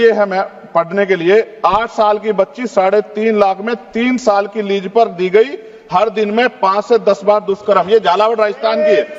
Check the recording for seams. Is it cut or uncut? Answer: uncut